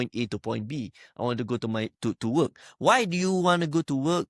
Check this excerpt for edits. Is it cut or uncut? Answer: uncut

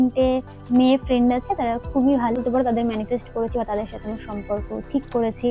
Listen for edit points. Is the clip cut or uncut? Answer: cut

